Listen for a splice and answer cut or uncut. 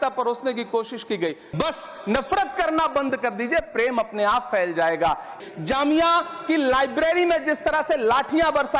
cut